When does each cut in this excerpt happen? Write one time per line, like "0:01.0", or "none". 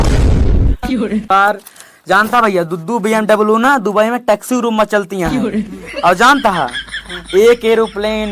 0:01.3